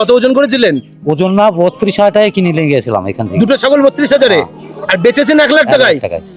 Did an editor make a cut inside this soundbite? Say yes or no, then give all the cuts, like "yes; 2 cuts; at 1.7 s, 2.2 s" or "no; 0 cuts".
no; 0 cuts